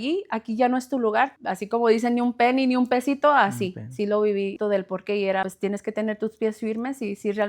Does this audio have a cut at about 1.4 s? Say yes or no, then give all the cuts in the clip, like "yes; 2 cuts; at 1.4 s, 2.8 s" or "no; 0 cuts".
yes; 3 cuts; at 1.4 s, 4.5 s, 5.5 s